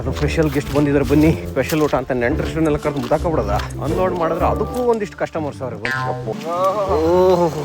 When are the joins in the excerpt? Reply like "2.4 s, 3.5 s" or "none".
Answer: 6.3 s

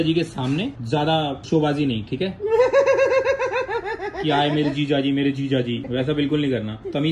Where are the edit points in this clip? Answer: none

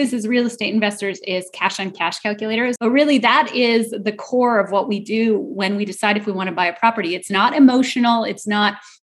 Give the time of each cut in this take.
2.8 s

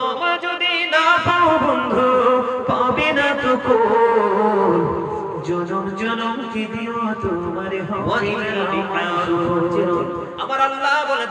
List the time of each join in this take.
10.4 s

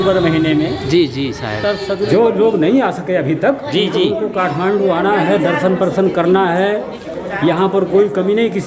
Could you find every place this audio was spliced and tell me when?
2.1 s

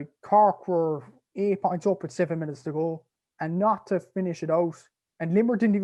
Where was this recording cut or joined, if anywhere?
none

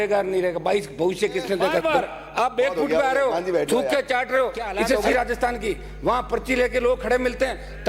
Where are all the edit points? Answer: 1.8 s, 5.0 s

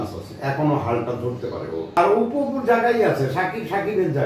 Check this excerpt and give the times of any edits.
1.9 s

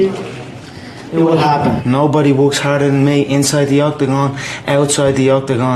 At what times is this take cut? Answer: 1.8 s

